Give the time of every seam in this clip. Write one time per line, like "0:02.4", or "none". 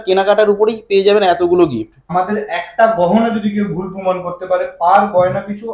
0:02.0